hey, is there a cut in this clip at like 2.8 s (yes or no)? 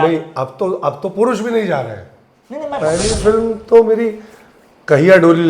yes